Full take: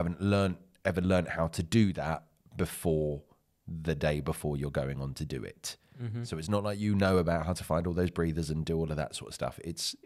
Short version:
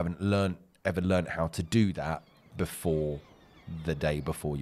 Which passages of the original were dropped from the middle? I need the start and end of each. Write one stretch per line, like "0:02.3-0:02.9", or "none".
none